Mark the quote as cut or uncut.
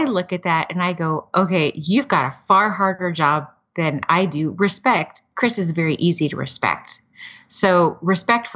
uncut